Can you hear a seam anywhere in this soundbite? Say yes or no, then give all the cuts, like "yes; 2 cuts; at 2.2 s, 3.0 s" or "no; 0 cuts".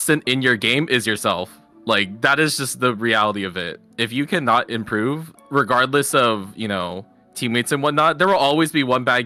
no; 0 cuts